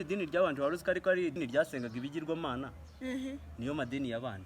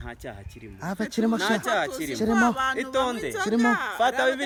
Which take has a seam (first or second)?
first